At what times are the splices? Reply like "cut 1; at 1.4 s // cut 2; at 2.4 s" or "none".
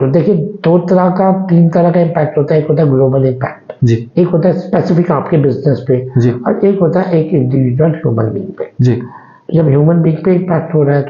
none